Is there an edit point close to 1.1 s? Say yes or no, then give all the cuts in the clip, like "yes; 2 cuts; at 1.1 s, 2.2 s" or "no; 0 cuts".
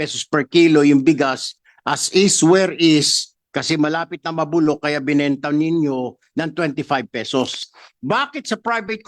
no; 1 cut; at 7.6 s